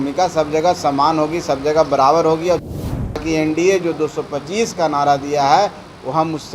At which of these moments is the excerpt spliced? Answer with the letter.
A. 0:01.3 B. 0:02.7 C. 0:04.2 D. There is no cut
B